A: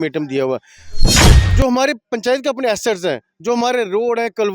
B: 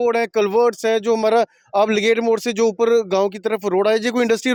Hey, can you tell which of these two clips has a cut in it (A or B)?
A